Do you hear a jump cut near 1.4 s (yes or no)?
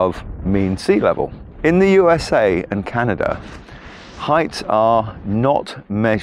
yes